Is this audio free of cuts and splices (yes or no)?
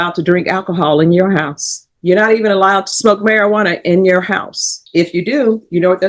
yes